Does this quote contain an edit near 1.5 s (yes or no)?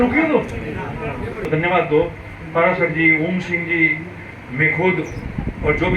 yes